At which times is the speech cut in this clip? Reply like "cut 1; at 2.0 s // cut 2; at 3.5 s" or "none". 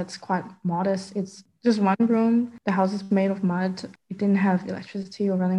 cut 1; at 1.4 s // cut 2; at 3.9 s